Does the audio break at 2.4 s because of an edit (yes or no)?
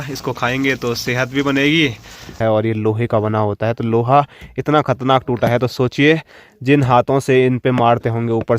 yes